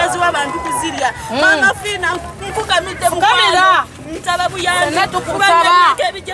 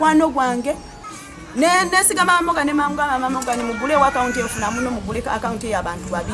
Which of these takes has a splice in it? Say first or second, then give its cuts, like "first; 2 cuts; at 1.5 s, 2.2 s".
second; 1 cut; at 0.9 s